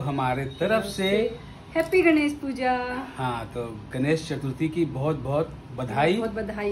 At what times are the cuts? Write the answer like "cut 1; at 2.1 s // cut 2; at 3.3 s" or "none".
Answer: none